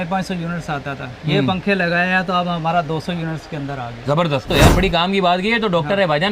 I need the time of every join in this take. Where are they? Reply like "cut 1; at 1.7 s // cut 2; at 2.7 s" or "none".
cut 1; at 4.5 s